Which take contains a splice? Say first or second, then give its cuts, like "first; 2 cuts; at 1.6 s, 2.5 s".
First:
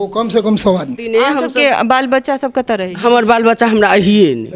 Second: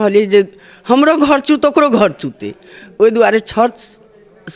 first; 1 cut; at 1.0 s